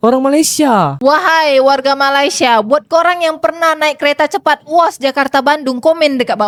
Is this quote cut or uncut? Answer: uncut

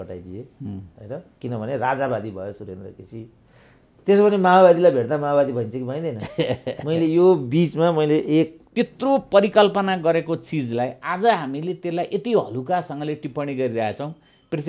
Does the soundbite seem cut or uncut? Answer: cut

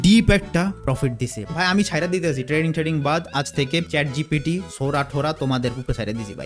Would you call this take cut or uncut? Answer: cut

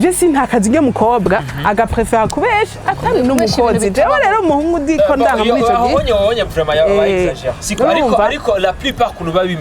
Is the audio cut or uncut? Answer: uncut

